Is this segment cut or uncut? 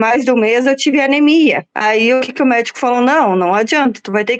uncut